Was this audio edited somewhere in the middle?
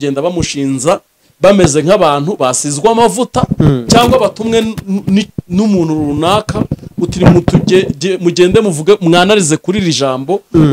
no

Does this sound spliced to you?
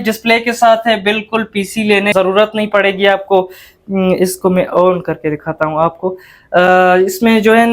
yes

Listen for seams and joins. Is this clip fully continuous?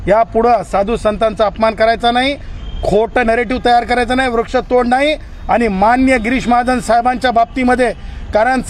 yes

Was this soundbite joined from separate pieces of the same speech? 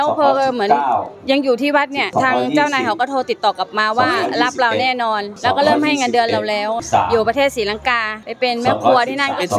no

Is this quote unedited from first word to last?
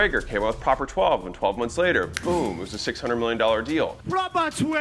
yes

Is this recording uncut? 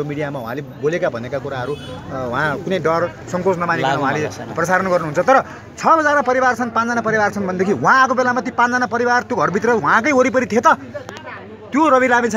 yes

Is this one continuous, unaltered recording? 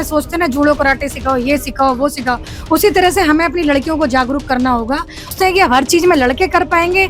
no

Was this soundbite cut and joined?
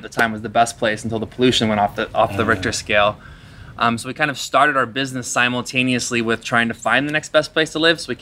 no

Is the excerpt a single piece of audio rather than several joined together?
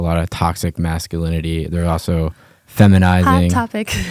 yes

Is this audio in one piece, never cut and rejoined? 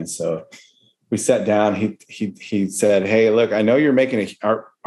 yes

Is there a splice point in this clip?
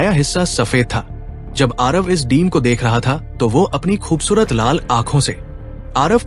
no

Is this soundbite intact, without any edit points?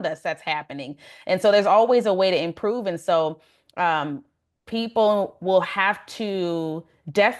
yes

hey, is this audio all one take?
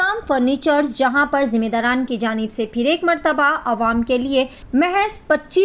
no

